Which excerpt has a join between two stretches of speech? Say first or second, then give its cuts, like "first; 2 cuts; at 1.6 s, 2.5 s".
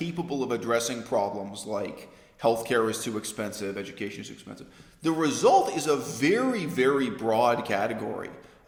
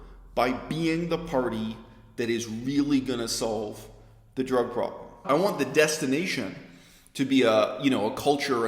second; 1 cut; at 5.2 s